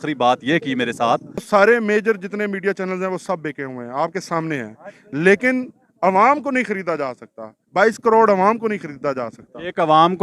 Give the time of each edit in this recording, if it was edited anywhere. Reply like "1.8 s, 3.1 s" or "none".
1.5 s

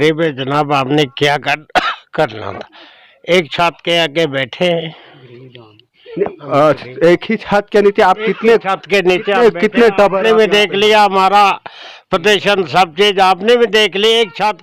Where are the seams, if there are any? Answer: none

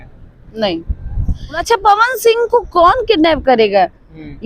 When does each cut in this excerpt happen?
1.6 s

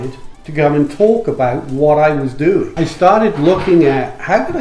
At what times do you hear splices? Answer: 2.7 s

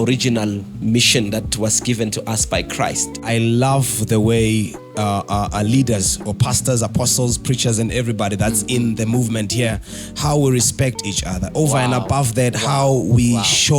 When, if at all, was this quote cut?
3.1 s

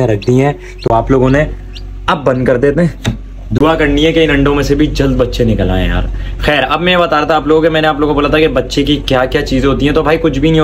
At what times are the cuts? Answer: none

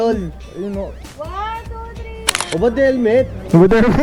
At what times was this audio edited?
2.2 s

